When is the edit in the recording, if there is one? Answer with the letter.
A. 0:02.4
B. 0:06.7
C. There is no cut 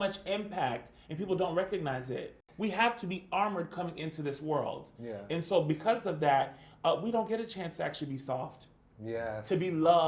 A